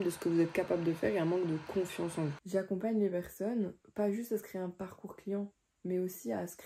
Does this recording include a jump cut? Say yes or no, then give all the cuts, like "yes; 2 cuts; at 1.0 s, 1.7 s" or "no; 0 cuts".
yes; 1 cut; at 2.4 s